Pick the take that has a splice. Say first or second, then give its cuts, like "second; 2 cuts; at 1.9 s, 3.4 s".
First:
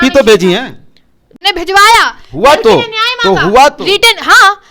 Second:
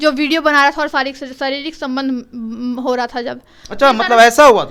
first; 1 cut; at 1.3 s